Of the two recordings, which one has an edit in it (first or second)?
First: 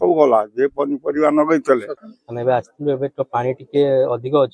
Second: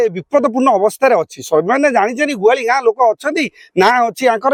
first